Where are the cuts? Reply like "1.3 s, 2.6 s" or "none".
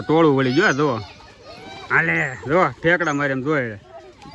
none